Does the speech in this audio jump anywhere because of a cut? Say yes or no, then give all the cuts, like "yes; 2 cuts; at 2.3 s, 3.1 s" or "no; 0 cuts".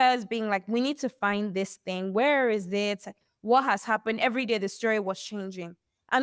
no; 0 cuts